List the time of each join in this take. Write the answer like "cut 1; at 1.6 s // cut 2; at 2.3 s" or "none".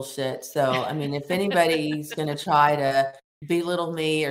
none